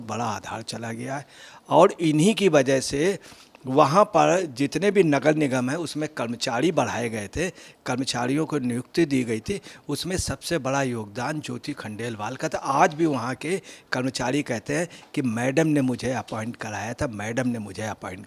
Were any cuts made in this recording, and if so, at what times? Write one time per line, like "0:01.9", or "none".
none